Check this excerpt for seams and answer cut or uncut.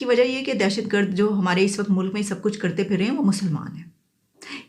uncut